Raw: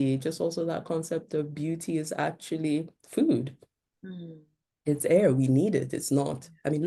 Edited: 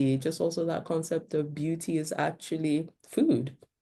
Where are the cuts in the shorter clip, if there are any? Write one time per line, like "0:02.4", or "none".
none